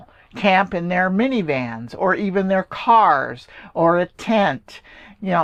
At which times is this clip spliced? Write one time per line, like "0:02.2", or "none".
none